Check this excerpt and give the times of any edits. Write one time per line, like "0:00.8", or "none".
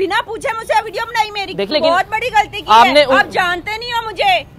0:01.7